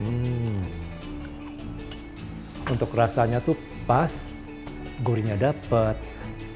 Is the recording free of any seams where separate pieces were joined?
yes; 0 cuts

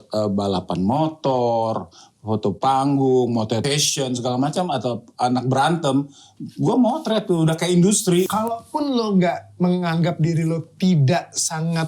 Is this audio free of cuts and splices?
no; 2 cuts; at 3.6 s, 8.3 s

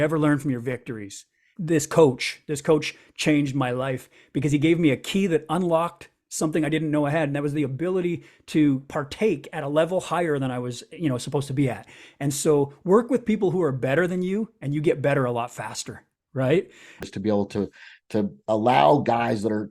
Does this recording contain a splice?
yes; 2 cuts; at 1.5 s, 17.0 s

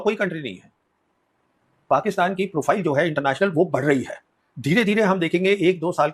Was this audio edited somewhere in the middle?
yes; 1 cut; at 1.7 s

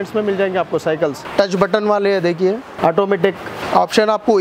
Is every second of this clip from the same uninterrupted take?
no; 3 cuts; at 1.2 s, 2.7 s, 3.6 s

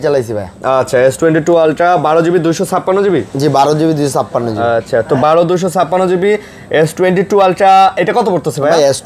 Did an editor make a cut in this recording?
no; 0 cuts

